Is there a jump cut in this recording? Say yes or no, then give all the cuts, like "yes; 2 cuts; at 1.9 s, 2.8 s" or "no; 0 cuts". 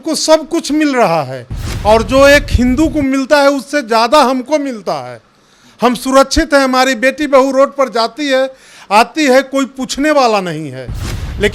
no; 0 cuts